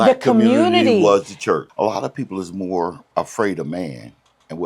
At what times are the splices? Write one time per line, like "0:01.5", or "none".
0:01.7
0:03.0